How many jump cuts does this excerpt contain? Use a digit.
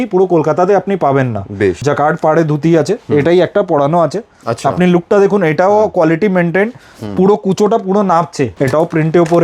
2